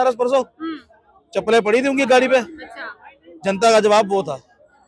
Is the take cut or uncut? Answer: uncut